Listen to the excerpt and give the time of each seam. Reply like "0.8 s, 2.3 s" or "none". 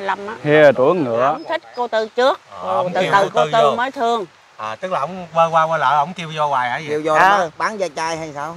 1.5 s